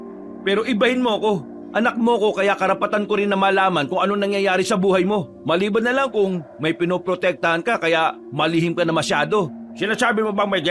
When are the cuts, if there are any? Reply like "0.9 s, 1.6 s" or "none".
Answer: 1.5 s, 5.3 s